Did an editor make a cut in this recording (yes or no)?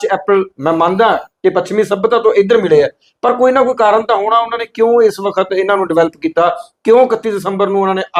no